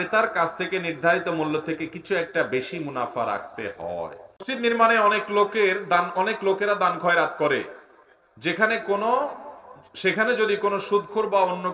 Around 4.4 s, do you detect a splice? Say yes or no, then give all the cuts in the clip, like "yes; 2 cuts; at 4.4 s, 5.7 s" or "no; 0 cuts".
yes; 1 cut; at 4.4 s